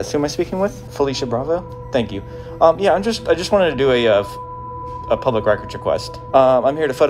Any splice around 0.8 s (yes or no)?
yes